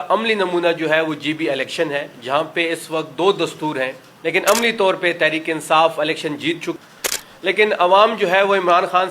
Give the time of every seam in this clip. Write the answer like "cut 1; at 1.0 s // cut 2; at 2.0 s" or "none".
cut 1; at 4.0 s // cut 2; at 6.8 s